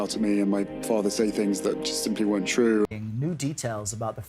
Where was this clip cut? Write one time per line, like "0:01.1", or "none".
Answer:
0:02.9